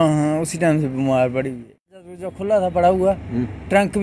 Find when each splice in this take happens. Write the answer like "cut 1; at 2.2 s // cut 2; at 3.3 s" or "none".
cut 1; at 2.0 s